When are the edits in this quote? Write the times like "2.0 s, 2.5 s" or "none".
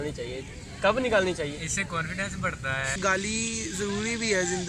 3.0 s